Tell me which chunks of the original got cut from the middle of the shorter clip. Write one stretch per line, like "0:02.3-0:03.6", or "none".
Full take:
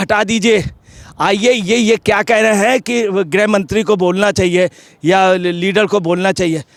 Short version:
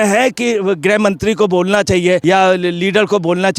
0:04.7-0:05.0